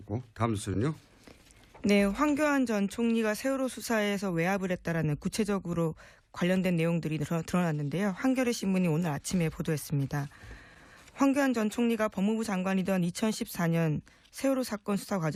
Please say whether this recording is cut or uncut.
uncut